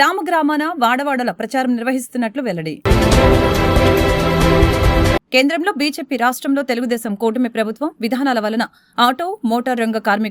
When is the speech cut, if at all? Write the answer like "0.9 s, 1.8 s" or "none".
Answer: none